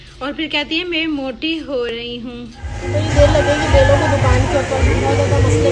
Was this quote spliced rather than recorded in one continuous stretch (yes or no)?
yes